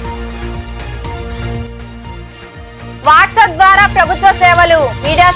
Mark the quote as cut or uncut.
uncut